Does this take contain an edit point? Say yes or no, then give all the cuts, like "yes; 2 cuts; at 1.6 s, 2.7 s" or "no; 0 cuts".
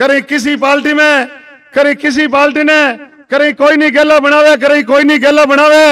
no; 0 cuts